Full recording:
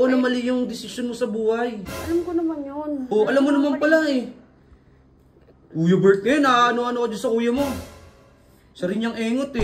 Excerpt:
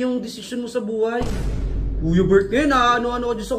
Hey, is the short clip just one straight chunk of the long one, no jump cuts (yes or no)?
no